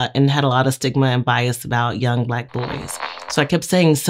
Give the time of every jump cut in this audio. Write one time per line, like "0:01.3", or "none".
0:02.9